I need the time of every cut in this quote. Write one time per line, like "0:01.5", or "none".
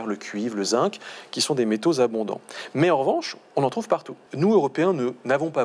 0:04.2